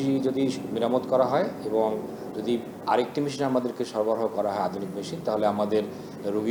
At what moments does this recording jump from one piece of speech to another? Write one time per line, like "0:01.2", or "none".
none